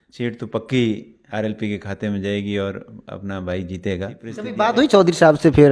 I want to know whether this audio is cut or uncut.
cut